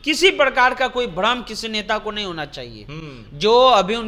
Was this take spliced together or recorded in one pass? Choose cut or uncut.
uncut